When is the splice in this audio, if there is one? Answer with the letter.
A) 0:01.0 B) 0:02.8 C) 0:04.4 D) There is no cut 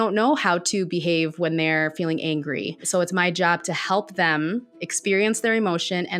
B